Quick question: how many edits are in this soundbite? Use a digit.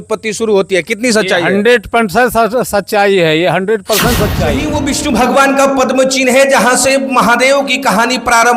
1